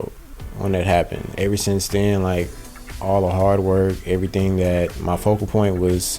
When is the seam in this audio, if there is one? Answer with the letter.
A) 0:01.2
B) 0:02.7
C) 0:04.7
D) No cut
A